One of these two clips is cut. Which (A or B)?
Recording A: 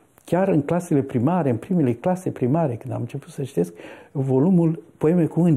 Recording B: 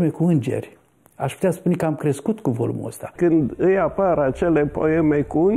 B